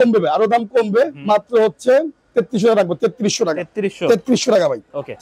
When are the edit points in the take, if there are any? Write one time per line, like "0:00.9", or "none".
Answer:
none

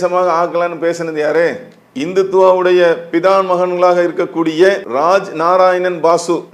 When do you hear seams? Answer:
0:04.9

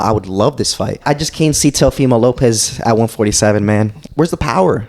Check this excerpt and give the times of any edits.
0:01.0
0:04.0

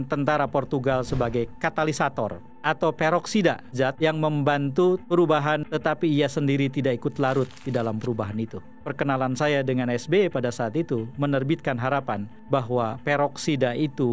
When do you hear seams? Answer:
0:03.7
0:05.6
0:08.8

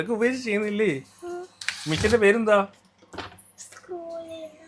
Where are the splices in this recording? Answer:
none

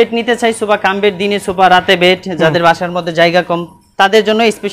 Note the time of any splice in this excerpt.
none

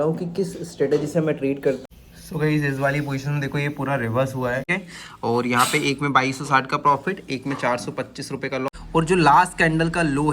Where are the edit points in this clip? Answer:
0:01.8
0:04.7
0:08.7

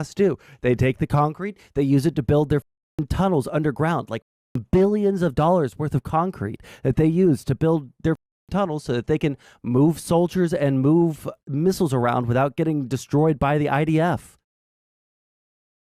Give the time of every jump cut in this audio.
none

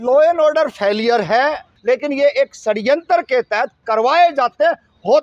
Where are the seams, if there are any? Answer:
0:01.7

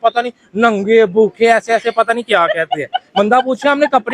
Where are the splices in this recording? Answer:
none

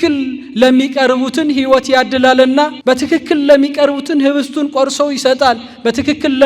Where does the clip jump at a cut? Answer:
0:02.8

